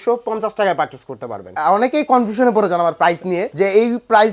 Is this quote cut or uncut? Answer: cut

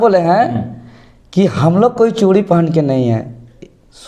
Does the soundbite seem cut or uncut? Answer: uncut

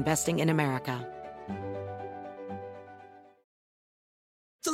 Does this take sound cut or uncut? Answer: cut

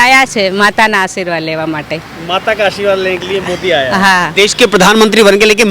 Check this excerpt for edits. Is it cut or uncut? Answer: cut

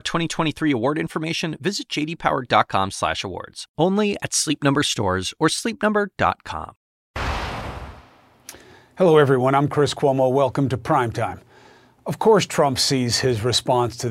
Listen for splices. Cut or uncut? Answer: cut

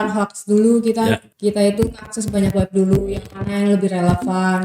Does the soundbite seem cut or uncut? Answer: cut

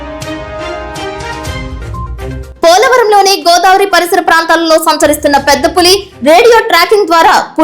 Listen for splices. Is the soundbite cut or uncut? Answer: cut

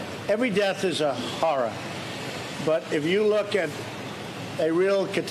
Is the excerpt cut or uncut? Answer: uncut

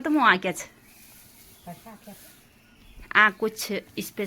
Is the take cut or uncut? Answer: uncut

